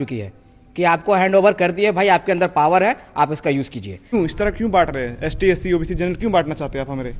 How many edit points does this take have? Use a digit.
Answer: 1